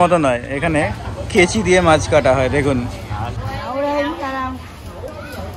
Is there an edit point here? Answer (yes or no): no